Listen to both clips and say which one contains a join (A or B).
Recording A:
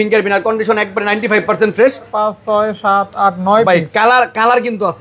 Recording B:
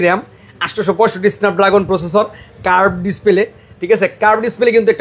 A